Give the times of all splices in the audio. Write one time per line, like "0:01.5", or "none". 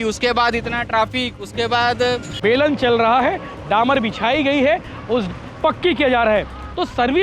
0:02.3